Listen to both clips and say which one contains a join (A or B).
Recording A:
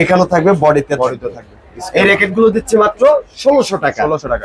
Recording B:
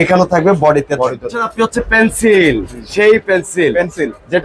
B